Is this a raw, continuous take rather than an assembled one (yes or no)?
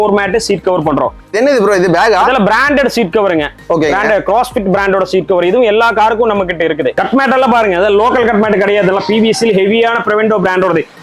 no